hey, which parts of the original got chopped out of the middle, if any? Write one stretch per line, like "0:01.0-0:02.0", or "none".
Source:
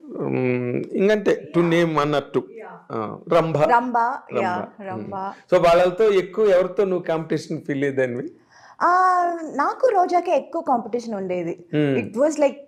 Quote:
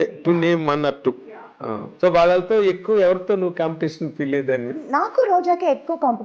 0:03.2-0:05.4
0:08.3-0:09.4